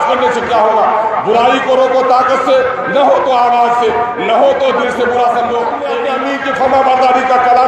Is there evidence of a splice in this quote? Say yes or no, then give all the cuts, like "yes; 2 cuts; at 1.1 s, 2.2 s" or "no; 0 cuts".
yes; 1 cut; at 6.0 s